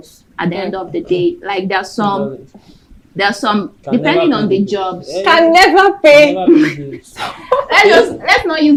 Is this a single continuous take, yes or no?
yes